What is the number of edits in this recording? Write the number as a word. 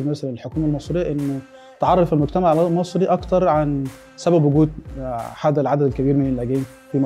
zero